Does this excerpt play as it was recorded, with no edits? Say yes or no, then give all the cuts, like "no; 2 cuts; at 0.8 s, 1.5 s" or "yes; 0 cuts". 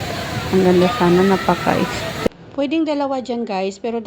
no; 1 cut; at 2.2 s